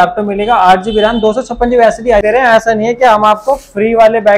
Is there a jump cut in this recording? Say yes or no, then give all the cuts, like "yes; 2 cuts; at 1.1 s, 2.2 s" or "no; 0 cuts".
yes; 1 cut; at 2.2 s